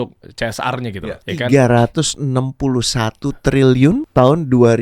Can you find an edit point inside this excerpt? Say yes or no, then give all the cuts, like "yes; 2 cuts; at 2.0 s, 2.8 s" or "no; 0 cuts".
yes; 2 cuts; at 1.2 s, 4.0 s